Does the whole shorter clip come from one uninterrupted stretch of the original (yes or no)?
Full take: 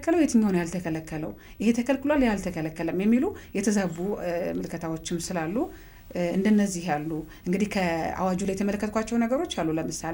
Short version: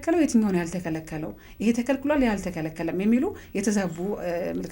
yes